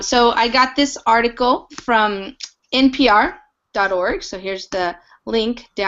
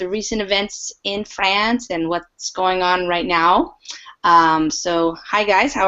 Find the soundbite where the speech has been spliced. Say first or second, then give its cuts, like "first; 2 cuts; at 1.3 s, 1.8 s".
first; 1 cut; at 3.2 s